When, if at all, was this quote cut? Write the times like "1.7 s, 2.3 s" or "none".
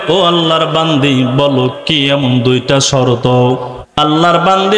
3.8 s